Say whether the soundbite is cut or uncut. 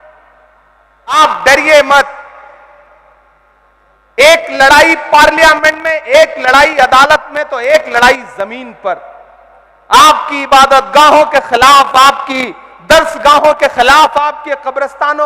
cut